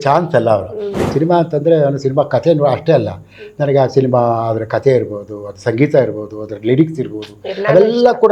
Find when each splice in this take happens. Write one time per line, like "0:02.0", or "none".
0:01.0